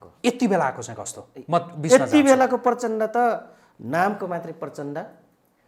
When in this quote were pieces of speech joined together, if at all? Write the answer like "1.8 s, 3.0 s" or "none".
none